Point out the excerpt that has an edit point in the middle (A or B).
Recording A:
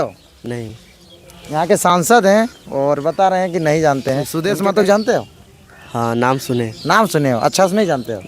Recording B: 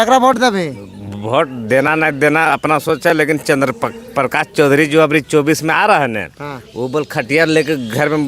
A